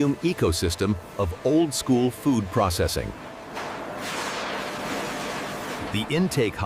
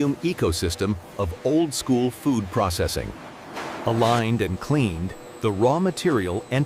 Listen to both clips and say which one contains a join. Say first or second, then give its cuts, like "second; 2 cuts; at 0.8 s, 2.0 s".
second; 1 cut; at 3.7 s